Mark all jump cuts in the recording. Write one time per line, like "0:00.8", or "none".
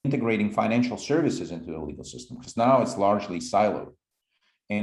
none